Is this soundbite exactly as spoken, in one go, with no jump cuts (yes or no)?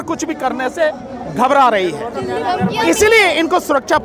yes